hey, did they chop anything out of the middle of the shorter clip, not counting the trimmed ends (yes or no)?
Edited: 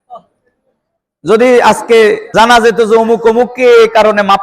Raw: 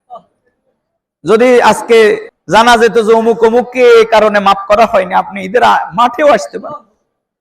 yes